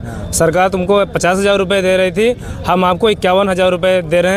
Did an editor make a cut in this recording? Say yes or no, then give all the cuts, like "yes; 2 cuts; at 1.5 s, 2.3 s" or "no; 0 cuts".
no; 0 cuts